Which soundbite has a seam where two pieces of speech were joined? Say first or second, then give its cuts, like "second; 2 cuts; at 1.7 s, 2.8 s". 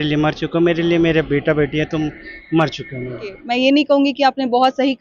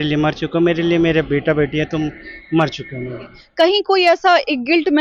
second; 1 cut; at 3.3 s